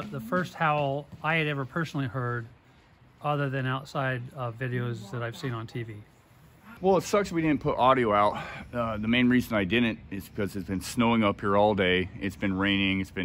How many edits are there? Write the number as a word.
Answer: one